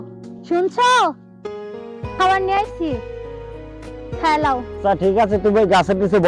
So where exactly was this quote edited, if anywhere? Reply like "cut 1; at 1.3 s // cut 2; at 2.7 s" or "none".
cut 1; at 4.7 s